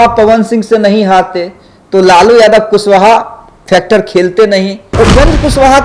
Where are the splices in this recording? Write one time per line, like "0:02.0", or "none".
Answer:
0:04.9